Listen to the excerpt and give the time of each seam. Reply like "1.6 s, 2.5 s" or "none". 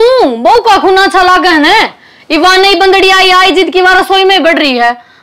none